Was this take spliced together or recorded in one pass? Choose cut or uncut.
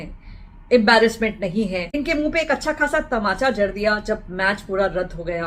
cut